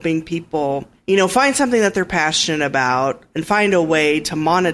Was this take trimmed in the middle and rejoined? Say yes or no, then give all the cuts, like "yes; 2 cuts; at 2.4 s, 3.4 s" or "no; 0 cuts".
yes; 1 cut; at 0.9 s